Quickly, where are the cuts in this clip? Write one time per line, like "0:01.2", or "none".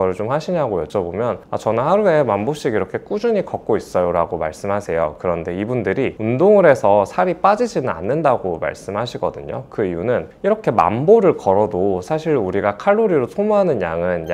none